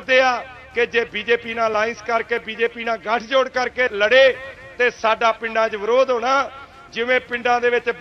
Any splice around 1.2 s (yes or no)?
no